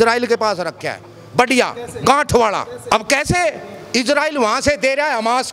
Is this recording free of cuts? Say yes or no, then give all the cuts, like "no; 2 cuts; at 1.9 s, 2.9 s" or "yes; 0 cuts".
no; 1 cut; at 2.8 s